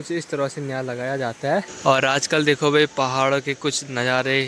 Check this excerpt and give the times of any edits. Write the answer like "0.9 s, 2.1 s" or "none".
1.6 s